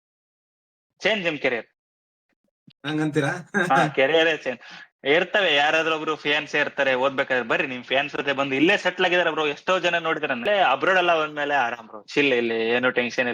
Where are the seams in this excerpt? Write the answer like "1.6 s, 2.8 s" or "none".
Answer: 10.4 s